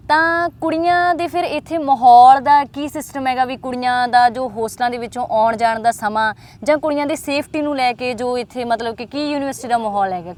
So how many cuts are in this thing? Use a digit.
0